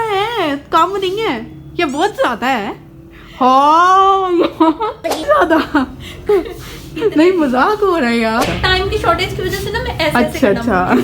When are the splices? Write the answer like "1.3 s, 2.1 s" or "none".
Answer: 5.3 s, 8.4 s